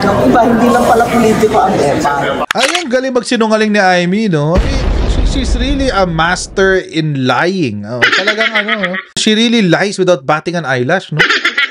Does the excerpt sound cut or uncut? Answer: cut